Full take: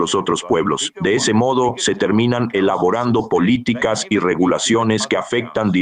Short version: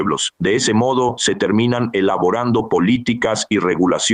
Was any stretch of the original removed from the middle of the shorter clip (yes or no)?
no